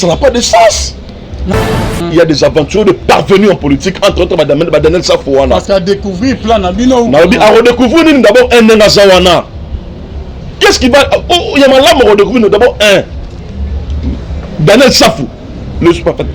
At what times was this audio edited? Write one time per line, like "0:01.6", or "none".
0:01.6

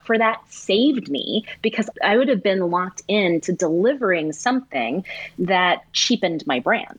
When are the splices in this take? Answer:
none

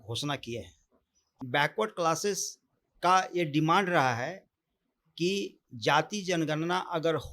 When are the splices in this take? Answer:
0:01.2

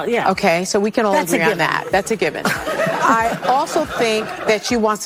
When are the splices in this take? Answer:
none

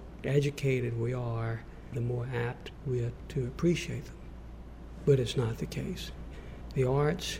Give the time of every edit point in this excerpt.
0:02.7
0:06.3

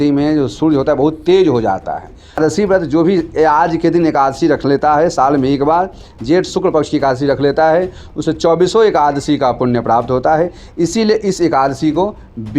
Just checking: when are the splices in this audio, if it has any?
0:02.4

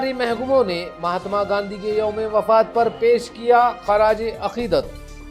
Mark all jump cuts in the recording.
none

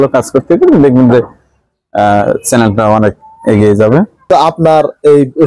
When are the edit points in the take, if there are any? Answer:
0:04.3

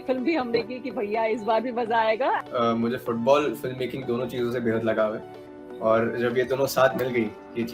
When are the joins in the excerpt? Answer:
0:02.4

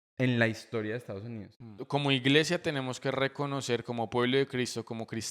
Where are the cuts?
0:01.8

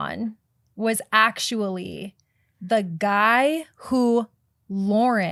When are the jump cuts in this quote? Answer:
none

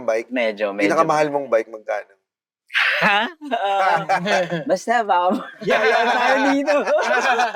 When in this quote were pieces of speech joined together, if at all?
none

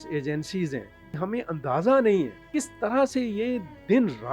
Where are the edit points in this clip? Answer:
0:01.2
0:02.4

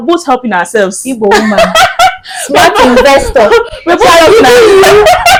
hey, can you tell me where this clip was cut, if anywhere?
none

